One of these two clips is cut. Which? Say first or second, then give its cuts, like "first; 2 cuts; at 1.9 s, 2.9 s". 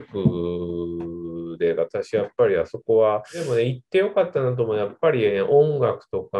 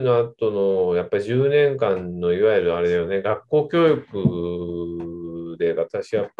first; 1 cut; at 3.3 s